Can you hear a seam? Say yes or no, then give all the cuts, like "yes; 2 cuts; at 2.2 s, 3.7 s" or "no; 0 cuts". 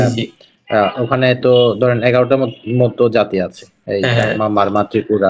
no; 0 cuts